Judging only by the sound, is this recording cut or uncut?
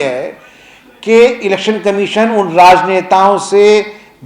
uncut